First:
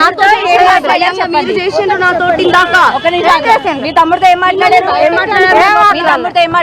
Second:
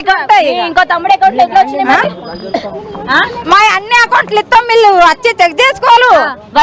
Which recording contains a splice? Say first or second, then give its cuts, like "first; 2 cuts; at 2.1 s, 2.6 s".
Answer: first; 1 cut; at 2.4 s